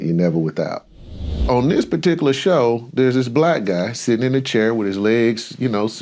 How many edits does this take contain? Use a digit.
1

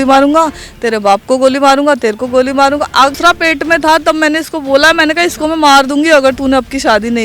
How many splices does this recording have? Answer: 1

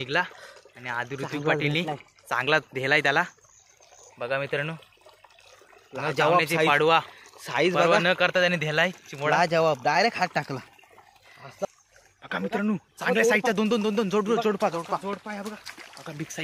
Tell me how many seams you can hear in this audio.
1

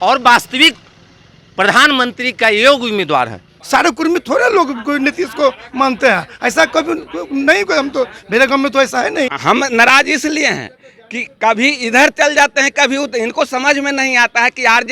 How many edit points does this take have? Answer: 2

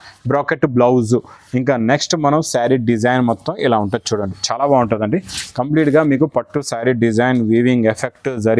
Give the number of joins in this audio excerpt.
0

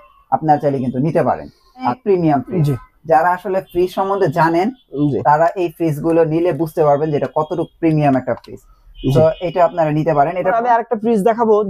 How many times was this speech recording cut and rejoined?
2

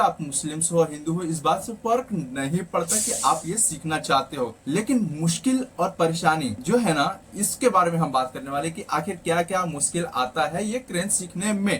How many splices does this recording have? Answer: 2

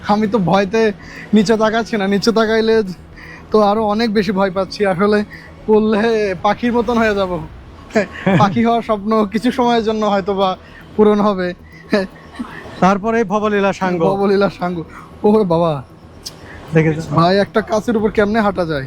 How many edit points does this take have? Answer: 0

